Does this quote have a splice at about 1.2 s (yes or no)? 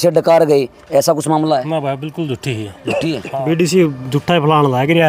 no